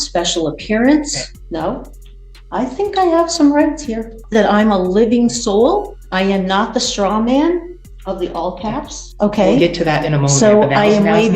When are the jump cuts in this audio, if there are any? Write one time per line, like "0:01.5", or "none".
0:01.3
0:04.2
0:06.0
0:09.1